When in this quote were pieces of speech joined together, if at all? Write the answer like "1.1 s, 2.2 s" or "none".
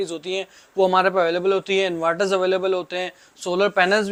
none